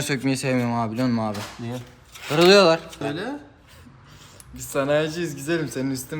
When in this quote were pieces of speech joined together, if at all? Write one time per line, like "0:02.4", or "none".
0:03.0